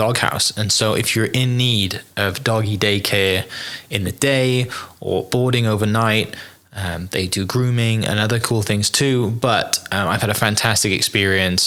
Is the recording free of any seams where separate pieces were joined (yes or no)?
yes